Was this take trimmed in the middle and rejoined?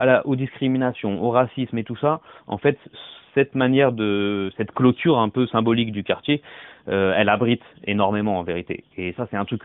no; 0 cuts

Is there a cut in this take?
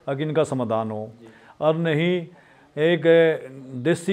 no; 0 cuts

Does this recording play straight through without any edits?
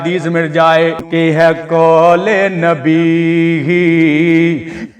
no; 1 cut; at 1.0 s

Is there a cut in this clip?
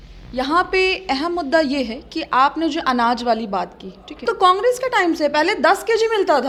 no; 0 cuts

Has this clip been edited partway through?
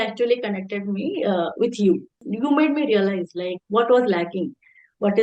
yes; 1 cut; at 2.3 s

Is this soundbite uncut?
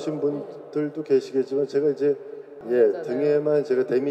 no; 1 cut; at 2.6 s

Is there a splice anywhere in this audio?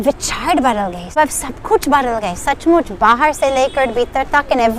yes; 1 cut; at 1.1 s

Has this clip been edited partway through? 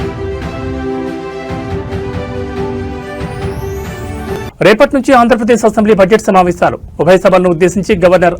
yes; 1 cut; at 4.1 s

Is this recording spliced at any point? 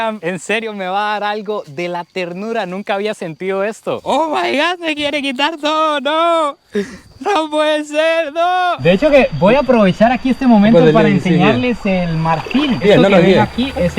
yes; 3 cuts; at 4.0 s, 8.8 s, 12.8 s

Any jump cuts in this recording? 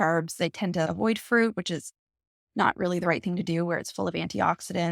no; 0 cuts

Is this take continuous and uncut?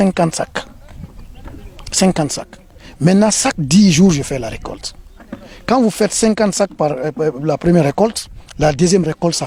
yes; 0 cuts

